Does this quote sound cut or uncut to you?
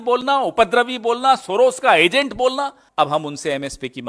cut